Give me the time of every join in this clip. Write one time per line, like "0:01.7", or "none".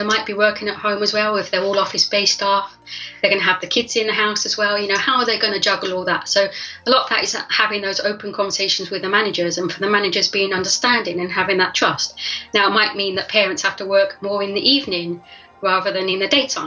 none